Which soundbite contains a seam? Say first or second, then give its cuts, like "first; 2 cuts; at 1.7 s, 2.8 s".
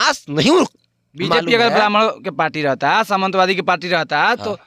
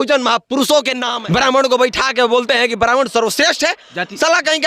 second; 1 cut; at 1.0 s